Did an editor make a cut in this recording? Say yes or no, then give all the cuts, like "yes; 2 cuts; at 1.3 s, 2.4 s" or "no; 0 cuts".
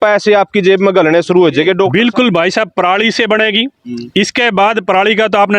yes; 1 cut; at 1.9 s